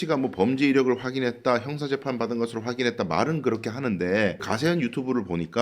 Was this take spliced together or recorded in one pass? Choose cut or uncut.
cut